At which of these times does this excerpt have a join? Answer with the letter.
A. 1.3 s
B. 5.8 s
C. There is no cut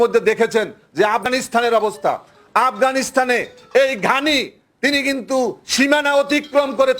A